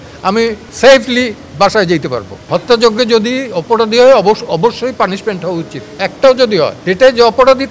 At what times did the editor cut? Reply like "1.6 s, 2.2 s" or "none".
2.3 s, 6.0 s, 6.8 s

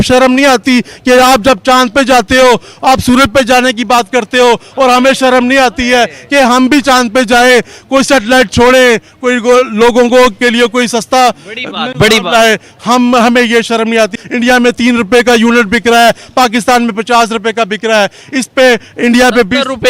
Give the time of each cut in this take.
none

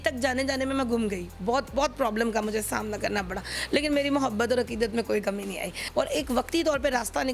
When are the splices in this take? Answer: 5.8 s

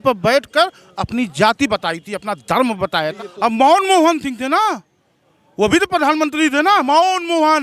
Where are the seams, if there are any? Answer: 3.1 s

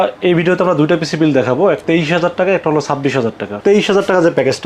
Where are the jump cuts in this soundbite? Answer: 1.8 s, 3.6 s

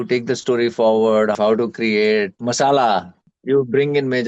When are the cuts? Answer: 1.3 s, 2.3 s, 3.3 s

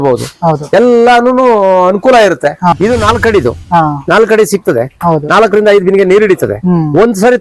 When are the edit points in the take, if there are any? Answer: 2.7 s

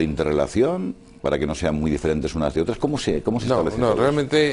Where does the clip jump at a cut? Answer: 3.4 s

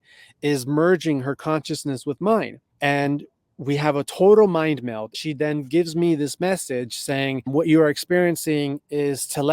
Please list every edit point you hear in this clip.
2.6 s, 5.1 s, 7.5 s

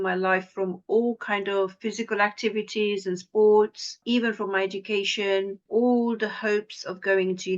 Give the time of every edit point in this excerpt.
4.0 s, 5.6 s

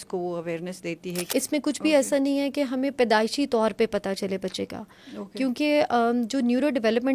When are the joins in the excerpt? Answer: 1.1 s

